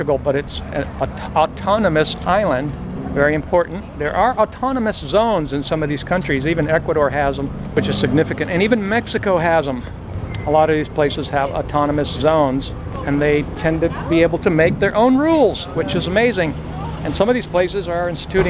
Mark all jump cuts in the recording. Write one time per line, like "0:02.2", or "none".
0:07.7